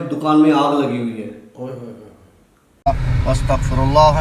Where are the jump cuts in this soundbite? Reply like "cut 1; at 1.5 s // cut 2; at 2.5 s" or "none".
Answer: cut 1; at 2.7 s